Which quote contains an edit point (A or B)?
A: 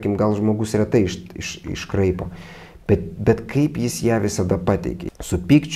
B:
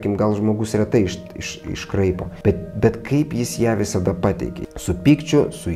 B